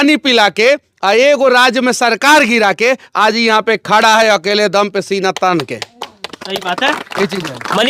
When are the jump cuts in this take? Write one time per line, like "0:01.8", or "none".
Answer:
none